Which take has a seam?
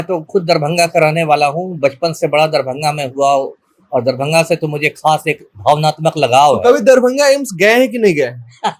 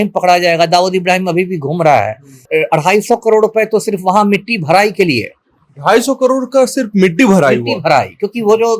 second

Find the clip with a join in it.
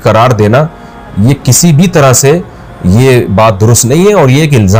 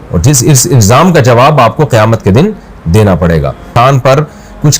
second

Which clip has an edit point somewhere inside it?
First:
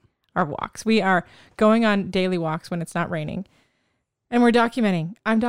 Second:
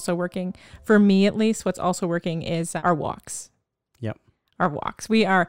second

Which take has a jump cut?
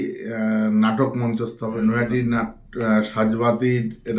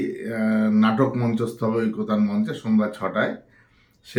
first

